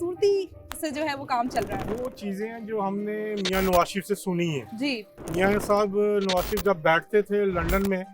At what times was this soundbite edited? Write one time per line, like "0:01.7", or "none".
0:01.8